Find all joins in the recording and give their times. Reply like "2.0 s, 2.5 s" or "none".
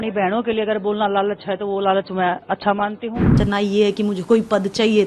3.4 s